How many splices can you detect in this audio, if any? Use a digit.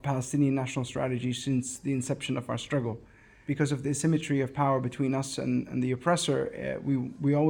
1